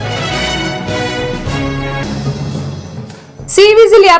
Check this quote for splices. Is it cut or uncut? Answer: cut